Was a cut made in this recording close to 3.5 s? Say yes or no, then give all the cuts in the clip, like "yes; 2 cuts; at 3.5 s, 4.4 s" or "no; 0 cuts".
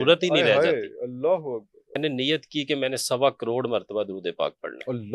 no; 1 cut; at 2.0 s